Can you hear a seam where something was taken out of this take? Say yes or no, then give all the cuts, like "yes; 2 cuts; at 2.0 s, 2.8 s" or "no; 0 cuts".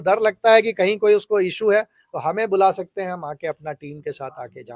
no; 0 cuts